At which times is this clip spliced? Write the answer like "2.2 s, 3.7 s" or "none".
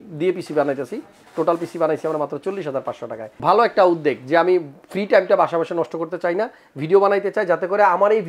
3.4 s